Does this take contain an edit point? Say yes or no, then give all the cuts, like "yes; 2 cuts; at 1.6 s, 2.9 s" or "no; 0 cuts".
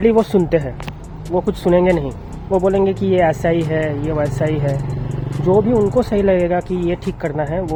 no; 0 cuts